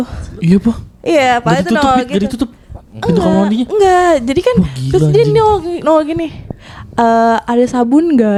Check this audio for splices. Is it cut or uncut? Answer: uncut